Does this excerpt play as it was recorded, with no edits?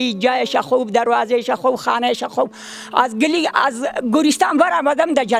yes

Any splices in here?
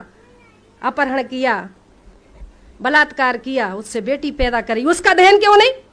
no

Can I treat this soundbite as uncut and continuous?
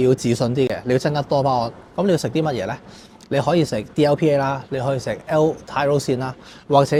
yes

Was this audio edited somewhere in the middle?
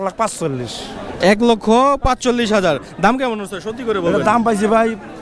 no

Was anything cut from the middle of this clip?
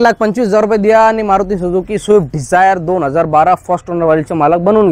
no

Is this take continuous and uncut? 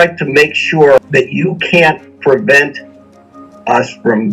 no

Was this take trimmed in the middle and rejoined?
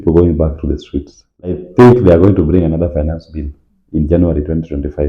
yes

